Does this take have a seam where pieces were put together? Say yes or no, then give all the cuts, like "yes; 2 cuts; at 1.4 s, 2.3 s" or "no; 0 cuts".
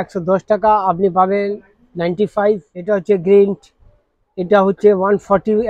no; 0 cuts